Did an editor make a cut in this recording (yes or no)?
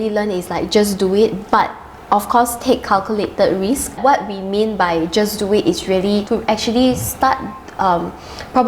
yes